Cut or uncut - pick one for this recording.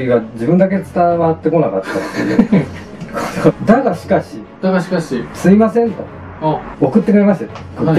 cut